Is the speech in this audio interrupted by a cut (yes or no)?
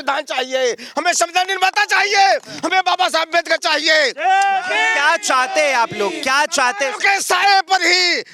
no